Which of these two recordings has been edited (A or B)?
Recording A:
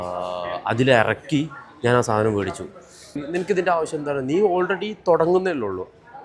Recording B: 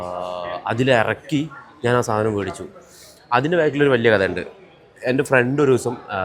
A